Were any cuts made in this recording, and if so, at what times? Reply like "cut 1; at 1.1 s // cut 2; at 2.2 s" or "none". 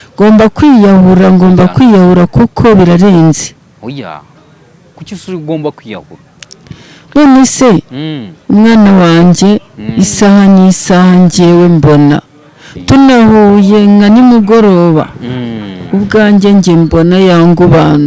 none